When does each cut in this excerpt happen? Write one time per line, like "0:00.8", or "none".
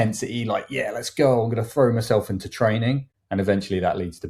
0:03.1

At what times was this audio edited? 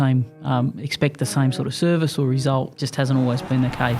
0:02.8

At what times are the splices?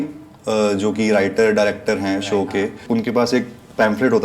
0:02.8

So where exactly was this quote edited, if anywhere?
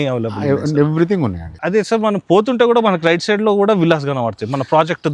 none

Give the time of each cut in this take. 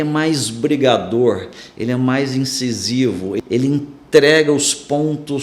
0:03.4

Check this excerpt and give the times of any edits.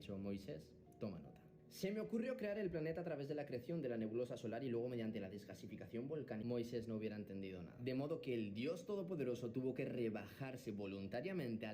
0:02.6
0:08.1

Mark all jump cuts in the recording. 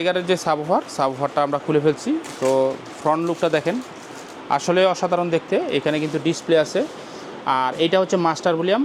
none

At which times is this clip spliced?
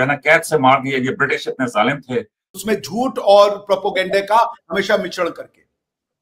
0:02.4

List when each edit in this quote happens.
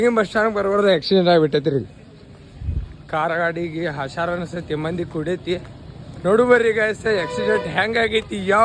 none

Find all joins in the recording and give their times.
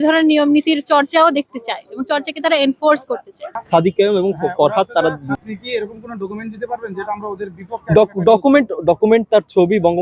0:03.5

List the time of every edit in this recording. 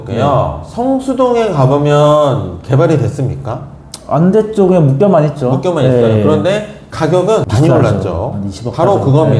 none

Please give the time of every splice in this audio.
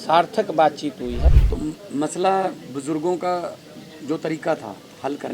0:01.2

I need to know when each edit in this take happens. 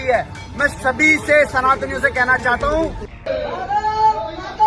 0:03.1

